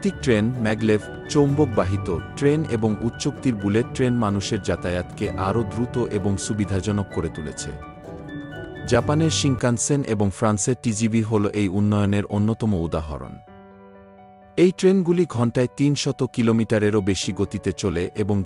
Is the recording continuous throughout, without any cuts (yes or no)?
yes